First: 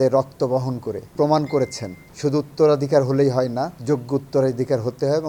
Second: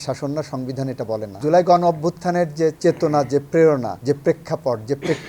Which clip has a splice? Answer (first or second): second